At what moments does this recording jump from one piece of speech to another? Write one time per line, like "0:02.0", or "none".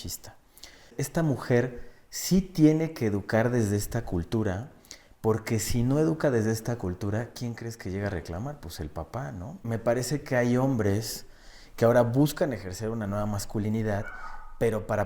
0:00.9
0:09.6